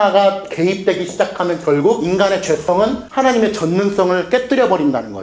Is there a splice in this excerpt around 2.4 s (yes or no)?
yes